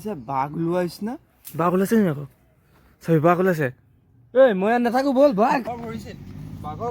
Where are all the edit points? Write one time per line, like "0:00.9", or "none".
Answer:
0:05.6